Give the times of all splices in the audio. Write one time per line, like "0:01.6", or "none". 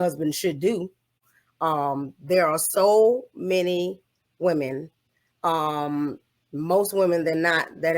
0:01.2